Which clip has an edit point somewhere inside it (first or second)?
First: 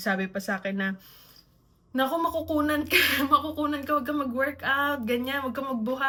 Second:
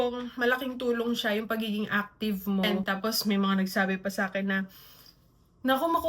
second